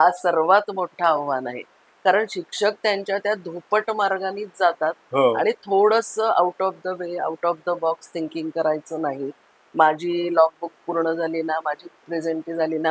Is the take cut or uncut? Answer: uncut